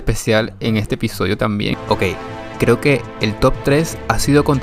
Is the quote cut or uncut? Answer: cut